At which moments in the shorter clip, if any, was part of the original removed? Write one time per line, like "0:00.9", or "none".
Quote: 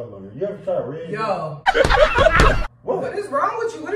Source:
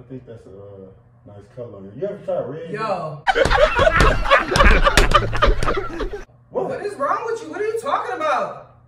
0:02.6

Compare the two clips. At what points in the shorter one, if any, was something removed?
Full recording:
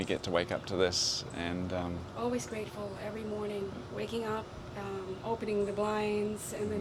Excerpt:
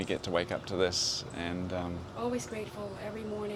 none

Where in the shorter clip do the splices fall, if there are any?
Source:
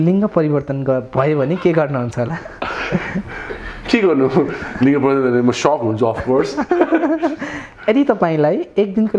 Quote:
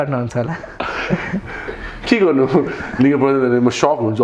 none

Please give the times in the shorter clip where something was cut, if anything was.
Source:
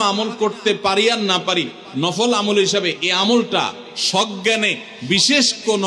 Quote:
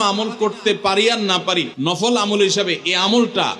0:01.7

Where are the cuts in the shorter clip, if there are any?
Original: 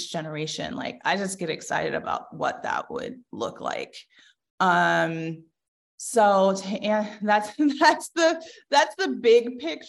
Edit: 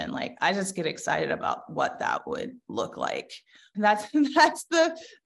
0:03.7

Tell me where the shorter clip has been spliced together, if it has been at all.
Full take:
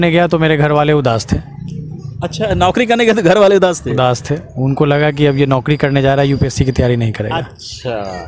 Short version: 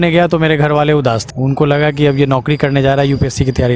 0:01.3

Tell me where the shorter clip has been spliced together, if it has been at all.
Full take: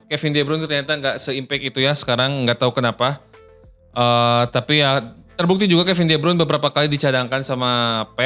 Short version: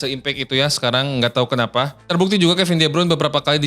0:02.0

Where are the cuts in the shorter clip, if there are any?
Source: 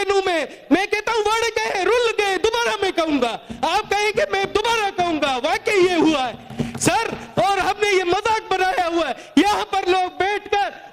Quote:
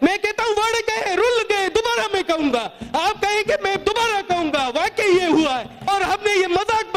0:05.9

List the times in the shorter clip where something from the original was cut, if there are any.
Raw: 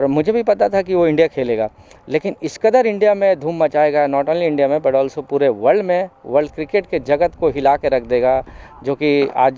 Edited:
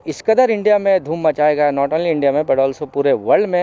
none

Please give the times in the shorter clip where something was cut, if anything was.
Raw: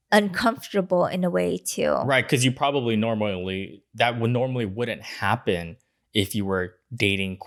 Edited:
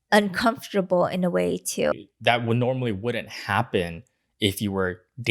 0:01.9

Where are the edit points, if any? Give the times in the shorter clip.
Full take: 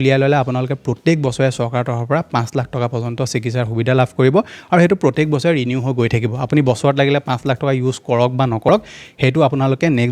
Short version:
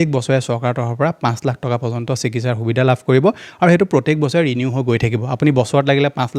none

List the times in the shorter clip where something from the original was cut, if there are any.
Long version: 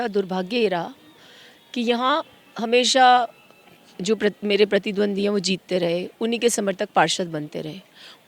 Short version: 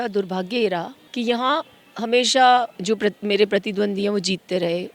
0:01.0
0:02.7

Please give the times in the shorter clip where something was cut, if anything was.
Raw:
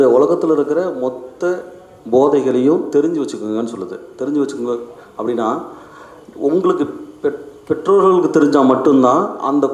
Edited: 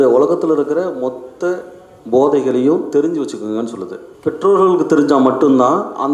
0:04.1

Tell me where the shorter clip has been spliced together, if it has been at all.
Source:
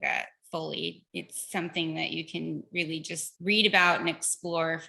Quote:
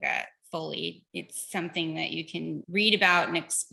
0:02.6

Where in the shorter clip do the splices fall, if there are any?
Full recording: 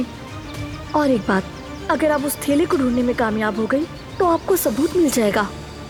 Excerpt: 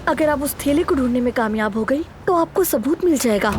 0:02.1

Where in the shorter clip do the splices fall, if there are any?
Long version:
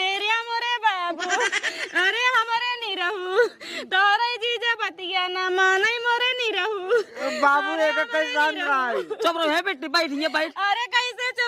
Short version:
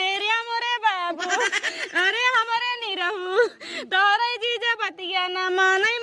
none

